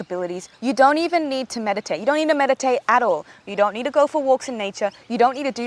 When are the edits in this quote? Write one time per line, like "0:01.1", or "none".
none